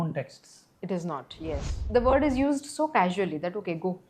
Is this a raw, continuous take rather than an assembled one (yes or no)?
no